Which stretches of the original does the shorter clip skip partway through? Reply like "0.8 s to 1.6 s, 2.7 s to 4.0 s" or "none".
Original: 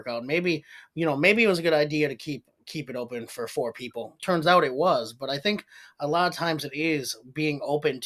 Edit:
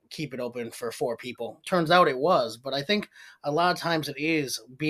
none